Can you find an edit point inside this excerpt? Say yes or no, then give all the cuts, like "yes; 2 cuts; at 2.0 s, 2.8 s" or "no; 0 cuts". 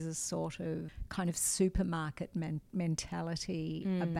yes; 1 cut; at 1.0 s